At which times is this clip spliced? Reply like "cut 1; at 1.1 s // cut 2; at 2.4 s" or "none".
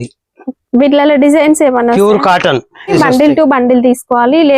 cut 1; at 2.9 s